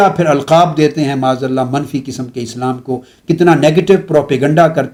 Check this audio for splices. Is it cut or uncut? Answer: uncut